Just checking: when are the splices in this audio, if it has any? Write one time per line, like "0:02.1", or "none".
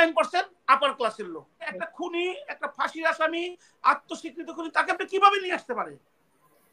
0:01.8